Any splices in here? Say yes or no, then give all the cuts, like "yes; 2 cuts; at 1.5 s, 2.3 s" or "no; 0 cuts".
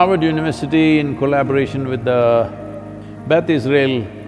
no; 0 cuts